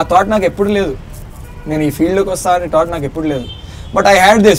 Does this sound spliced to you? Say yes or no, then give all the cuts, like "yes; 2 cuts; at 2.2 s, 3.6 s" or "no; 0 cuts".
no; 0 cuts